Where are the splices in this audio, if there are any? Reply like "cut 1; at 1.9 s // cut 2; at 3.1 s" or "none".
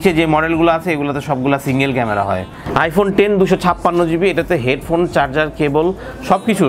cut 1; at 2.6 s

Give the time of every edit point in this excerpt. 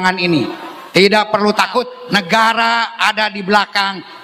cut 1; at 2.0 s

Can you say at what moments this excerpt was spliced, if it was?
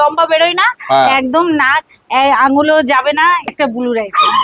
cut 1; at 3.5 s

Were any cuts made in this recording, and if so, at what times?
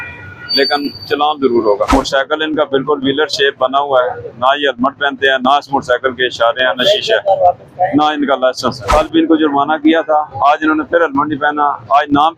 cut 1; at 1.9 s // cut 2; at 8.8 s

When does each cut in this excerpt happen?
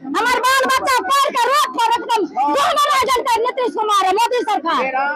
none

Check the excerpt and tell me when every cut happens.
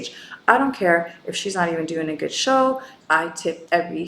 cut 1; at 2.9 s

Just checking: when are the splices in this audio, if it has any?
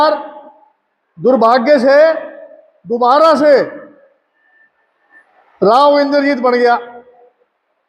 none

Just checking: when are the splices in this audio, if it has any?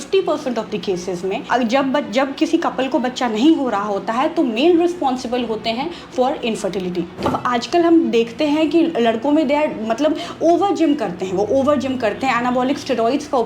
cut 1; at 1.4 s // cut 2; at 7.3 s

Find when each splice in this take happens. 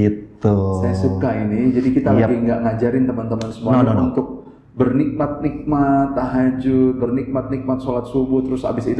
none

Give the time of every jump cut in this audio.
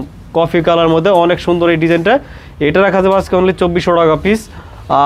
none

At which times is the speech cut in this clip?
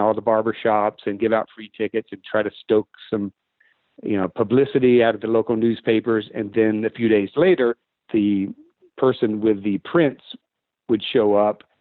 cut 1; at 7.9 s

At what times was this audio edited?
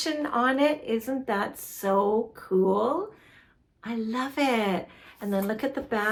none

